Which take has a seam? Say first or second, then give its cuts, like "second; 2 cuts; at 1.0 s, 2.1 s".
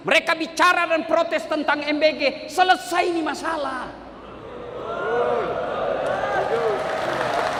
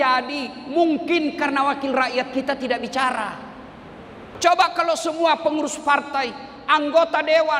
second; 1 cut; at 4.4 s